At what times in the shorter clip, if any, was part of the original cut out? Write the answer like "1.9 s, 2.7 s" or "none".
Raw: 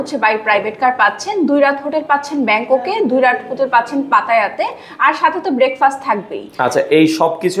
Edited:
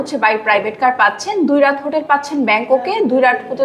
none